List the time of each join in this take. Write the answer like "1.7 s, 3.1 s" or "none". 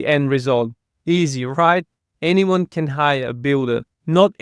2.1 s